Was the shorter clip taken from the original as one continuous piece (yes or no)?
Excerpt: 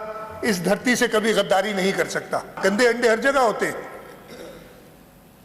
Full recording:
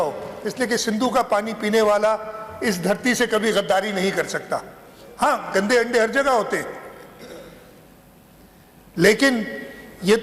no